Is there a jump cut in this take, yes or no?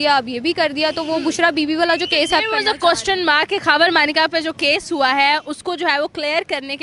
no